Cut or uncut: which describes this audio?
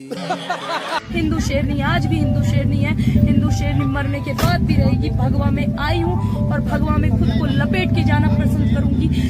cut